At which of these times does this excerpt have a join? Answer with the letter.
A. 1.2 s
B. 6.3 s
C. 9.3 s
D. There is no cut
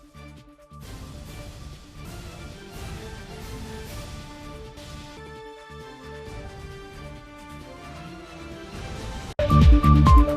C